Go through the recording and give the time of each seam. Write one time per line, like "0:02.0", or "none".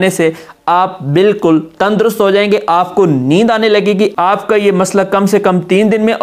0:04.1